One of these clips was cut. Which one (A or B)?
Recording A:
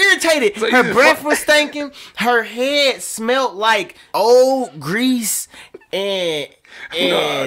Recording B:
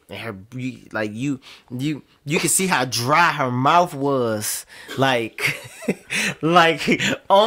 A